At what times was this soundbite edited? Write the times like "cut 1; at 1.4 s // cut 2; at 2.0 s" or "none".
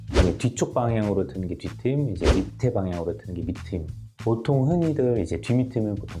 none